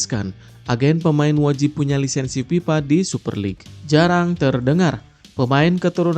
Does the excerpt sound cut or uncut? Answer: cut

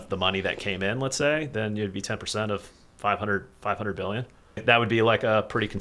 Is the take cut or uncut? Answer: cut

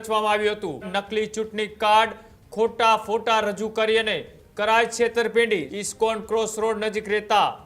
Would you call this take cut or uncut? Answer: cut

